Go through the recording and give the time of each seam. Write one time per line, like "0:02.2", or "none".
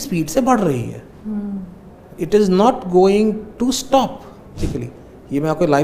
0:04.6